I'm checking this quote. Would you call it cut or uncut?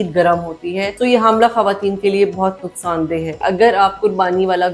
cut